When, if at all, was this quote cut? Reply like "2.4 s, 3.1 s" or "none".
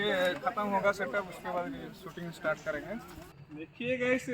3.2 s